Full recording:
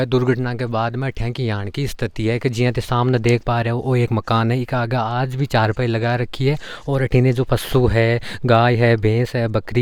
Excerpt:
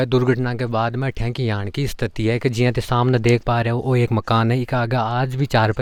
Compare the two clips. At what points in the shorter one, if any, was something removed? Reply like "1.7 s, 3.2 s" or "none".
none